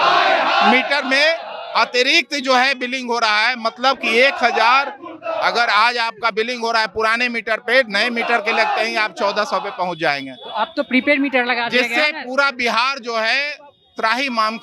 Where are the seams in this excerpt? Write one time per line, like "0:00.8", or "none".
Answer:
none